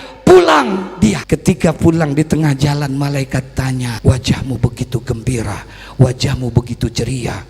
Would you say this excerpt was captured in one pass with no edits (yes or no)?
no